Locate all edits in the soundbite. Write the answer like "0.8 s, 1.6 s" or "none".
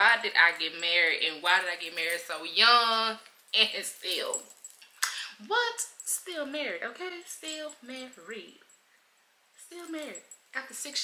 none